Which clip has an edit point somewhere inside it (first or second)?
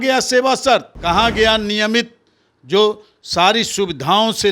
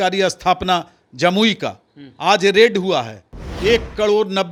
first